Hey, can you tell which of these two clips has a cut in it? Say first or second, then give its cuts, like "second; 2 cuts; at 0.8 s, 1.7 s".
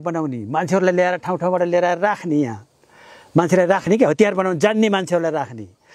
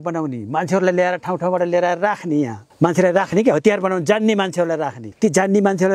second; 2 cuts; at 2.6 s, 5.0 s